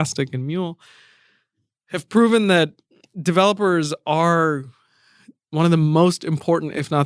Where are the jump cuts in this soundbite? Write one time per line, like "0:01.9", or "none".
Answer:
none